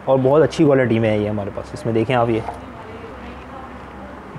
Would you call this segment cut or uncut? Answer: cut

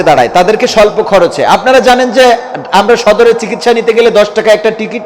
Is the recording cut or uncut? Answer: uncut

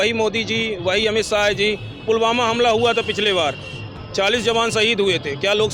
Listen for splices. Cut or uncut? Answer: uncut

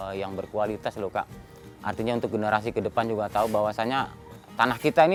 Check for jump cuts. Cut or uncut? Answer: uncut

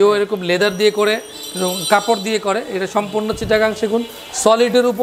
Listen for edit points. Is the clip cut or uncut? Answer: uncut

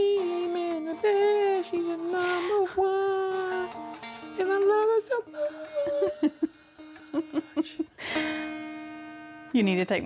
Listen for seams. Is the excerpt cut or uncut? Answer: cut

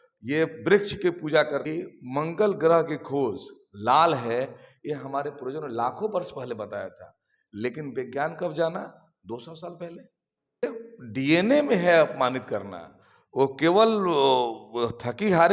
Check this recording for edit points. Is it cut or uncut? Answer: cut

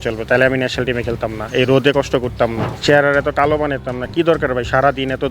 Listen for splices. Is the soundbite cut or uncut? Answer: cut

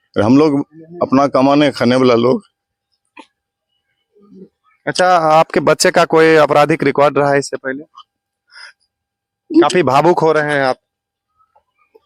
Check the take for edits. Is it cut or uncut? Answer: uncut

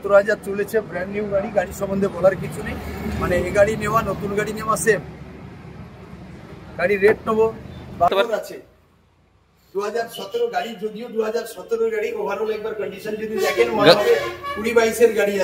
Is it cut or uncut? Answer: cut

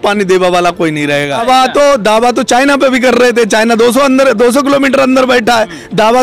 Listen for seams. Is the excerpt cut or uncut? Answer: cut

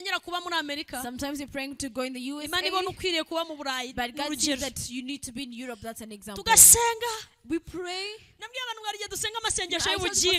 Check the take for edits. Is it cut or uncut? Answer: uncut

